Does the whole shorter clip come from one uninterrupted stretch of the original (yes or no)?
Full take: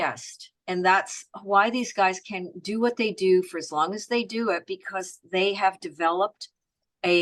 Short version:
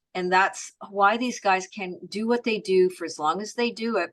yes